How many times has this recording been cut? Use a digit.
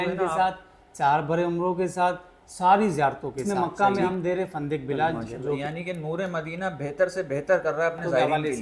2